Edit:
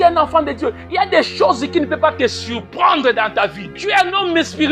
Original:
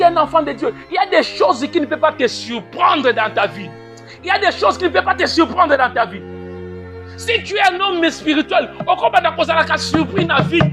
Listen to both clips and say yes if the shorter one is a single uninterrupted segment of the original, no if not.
no